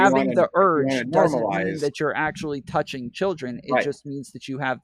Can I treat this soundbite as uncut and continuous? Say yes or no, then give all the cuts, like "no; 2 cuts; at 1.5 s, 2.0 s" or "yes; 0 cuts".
yes; 0 cuts